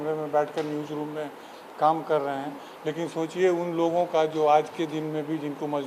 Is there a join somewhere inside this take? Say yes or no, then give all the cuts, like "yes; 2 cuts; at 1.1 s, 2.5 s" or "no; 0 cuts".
no; 0 cuts